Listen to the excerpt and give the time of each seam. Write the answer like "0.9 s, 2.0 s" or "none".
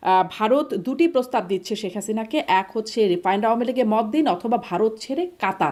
none